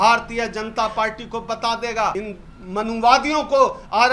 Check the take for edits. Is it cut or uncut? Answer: cut